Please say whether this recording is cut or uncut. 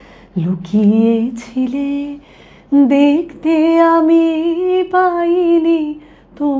uncut